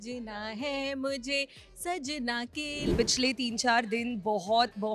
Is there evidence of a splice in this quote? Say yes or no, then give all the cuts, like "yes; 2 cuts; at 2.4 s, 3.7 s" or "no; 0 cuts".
yes; 1 cut; at 2.9 s